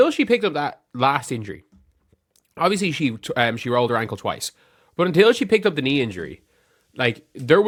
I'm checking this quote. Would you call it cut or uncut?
uncut